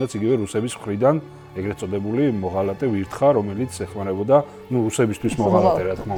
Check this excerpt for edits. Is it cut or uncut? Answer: uncut